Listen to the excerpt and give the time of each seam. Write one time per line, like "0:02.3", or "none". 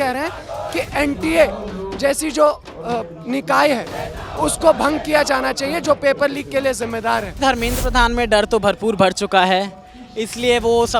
0:07.4